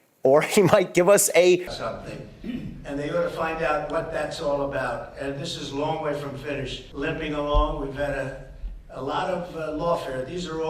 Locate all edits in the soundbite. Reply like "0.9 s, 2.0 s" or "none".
1.7 s, 6.8 s